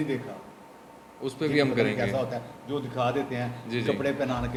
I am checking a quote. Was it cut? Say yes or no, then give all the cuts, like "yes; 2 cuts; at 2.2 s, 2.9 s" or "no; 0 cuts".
no; 0 cuts